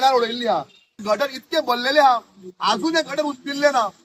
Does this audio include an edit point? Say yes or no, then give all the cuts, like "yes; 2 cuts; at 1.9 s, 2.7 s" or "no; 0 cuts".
yes; 1 cut; at 0.9 s